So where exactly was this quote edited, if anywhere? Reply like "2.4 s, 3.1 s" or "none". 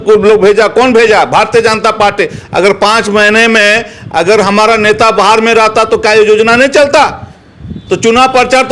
none